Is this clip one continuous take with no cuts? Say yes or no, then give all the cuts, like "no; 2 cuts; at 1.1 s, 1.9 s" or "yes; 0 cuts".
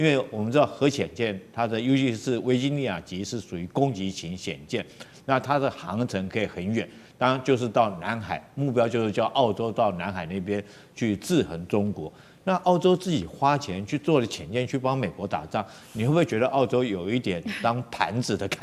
yes; 0 cuts